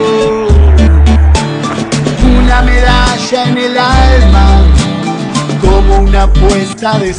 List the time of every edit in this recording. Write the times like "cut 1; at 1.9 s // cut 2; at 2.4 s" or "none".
cut 1; at 3.8 s